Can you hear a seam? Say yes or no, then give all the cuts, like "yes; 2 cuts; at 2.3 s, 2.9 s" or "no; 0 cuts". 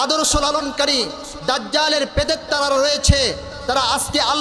no; 0 cuts